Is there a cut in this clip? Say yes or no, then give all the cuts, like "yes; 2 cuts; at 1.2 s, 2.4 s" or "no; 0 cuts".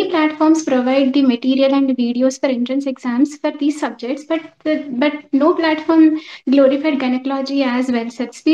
no; 0 cuts